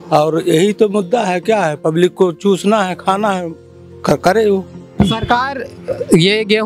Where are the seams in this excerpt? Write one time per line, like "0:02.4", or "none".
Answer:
0:04.8